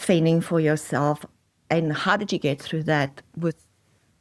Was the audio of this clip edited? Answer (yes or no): no